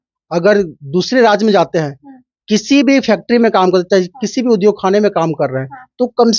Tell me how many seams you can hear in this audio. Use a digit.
0